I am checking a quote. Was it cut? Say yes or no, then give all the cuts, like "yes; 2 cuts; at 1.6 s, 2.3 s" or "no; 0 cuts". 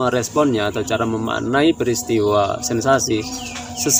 no; 0 cuts